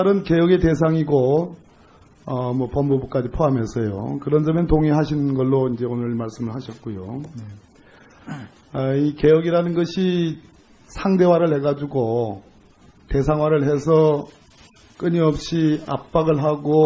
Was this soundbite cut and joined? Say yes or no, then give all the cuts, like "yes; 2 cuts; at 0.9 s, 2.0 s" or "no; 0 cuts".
no; 0 cuts